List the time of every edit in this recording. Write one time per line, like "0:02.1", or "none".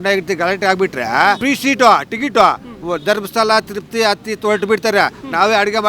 0:01.4